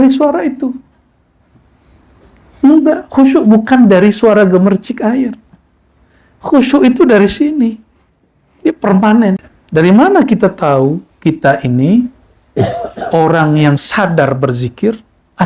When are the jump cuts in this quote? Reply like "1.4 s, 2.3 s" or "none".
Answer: 9.5 s